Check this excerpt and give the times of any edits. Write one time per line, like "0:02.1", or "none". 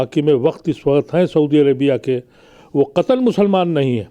none